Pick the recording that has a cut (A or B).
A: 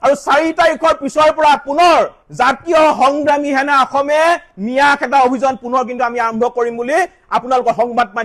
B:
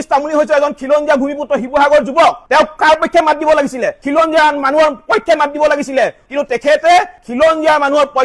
B